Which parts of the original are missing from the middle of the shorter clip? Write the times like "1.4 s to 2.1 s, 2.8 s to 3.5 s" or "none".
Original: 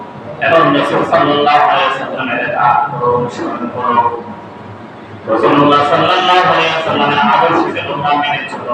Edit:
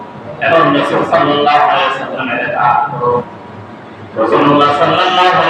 3.3 s to 4.4 s